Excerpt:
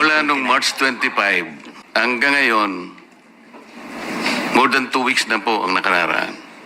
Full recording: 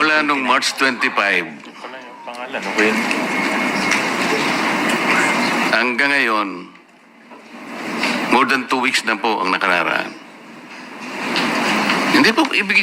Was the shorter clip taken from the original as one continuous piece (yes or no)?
no